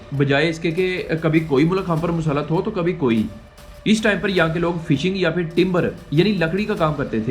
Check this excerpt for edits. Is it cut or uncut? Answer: cut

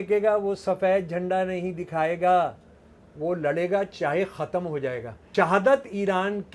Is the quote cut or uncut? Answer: cut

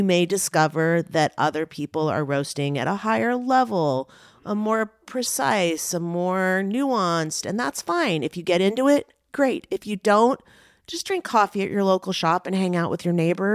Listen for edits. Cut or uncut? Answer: uncut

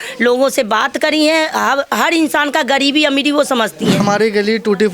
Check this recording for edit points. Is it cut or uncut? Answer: cut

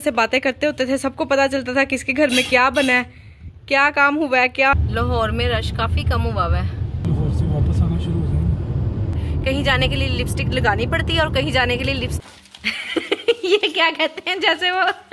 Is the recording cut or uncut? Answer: cut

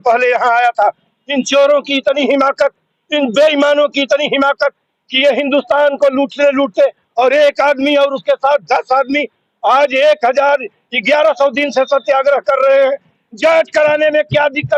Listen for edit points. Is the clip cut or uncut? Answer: uncut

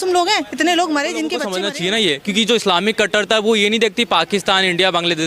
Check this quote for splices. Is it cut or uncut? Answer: cut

